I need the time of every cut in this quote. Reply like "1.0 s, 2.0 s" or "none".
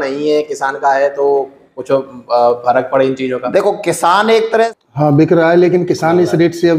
4.7 s